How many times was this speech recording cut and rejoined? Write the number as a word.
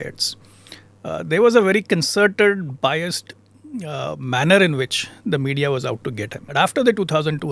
one